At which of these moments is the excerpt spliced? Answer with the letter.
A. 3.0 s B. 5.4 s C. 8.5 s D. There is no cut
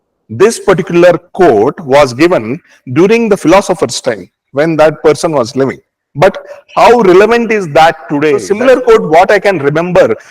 C